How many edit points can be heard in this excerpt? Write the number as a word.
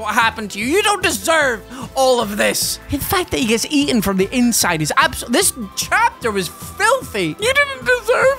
zero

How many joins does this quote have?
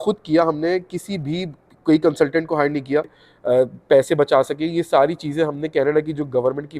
one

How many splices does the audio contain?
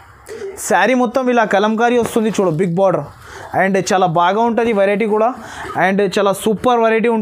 zero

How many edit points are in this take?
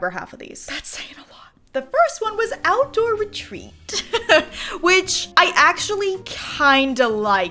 zero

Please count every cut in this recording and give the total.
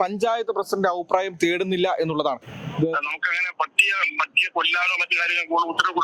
one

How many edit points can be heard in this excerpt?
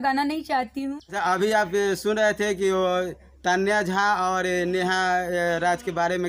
one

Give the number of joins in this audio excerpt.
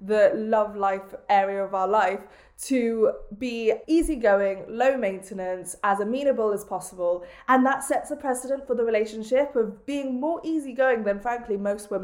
one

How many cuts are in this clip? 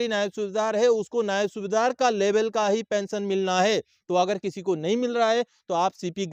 zero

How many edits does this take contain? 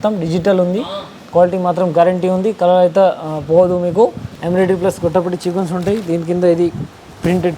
one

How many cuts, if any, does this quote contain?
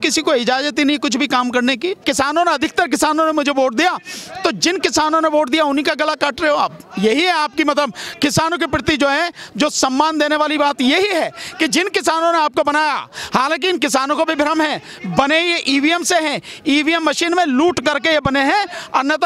one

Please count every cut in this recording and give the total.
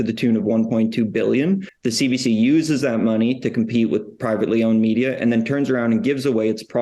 one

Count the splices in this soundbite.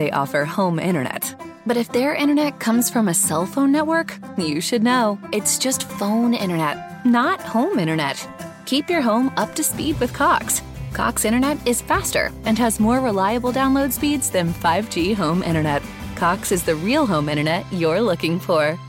zero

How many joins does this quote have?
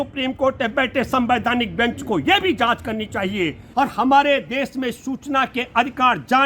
one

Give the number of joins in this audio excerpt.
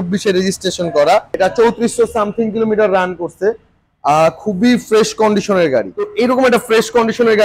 two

